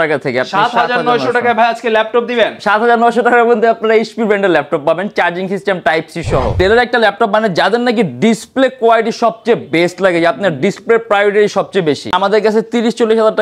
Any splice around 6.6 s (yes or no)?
yes